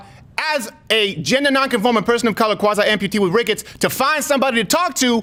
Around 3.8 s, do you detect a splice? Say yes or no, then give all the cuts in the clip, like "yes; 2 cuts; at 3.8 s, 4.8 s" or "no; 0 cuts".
no; 0 cuts